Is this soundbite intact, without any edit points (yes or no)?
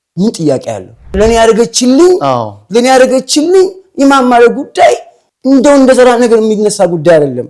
no